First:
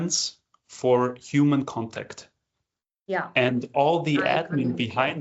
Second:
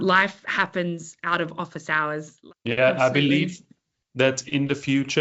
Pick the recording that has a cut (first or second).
second